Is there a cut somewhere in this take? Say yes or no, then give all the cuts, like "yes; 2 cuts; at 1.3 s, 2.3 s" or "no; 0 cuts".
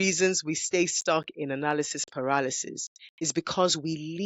no; 0 cuts